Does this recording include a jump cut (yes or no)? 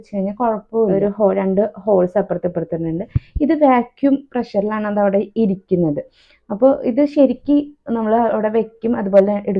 yes